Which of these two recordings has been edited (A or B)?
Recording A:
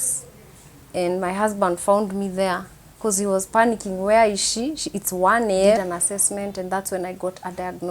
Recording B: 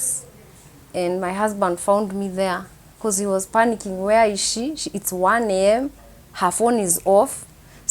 A